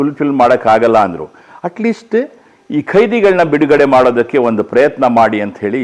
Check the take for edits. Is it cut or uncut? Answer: uncut